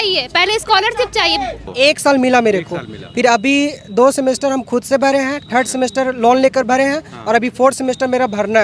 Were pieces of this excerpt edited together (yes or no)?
yes